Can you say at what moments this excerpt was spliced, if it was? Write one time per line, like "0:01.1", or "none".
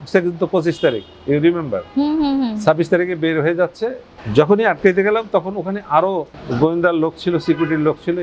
none